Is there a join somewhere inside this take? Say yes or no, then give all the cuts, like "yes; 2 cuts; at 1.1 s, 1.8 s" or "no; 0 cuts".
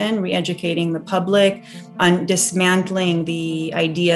yes; 1 cut; at 1.9 s